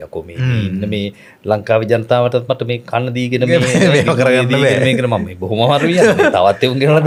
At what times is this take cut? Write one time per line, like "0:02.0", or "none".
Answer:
none